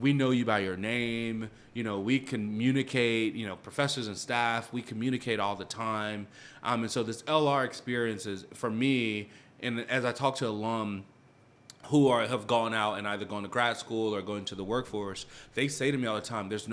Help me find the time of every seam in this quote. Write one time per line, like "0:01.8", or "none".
none

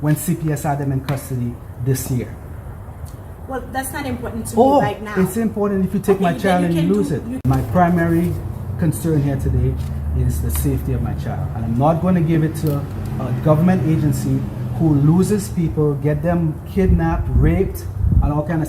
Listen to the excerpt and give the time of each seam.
0:07.3

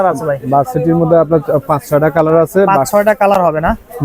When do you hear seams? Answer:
none

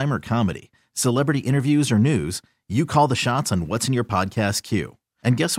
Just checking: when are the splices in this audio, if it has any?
none

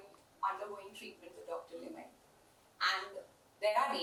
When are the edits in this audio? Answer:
none

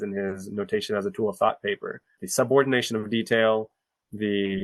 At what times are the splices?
0:02.2

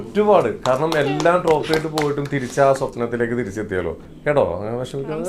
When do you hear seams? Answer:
0:04.1

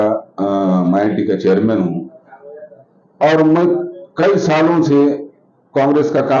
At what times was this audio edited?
none

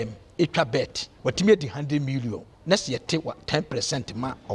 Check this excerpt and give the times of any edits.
0:01.0

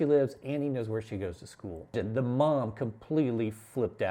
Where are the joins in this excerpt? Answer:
0:02.0

